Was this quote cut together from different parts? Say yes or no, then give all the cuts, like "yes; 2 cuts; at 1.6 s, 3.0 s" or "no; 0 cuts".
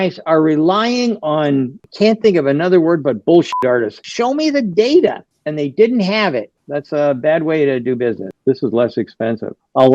yes; 3 cuts; at 4.0 s, 6.6 s, 8.3 s